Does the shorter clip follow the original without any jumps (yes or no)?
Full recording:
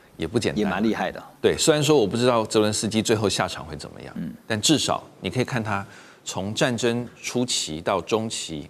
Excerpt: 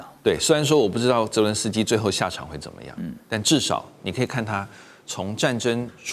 yes